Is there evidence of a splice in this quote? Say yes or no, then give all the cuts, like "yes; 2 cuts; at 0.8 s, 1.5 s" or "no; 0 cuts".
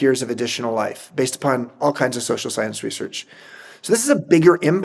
no; 0 cuts